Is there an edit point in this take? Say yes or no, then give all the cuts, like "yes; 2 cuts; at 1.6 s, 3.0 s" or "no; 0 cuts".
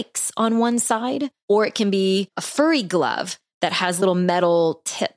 yes; 3 cuts; at 1.3 s, 2.4 s, 4.0 s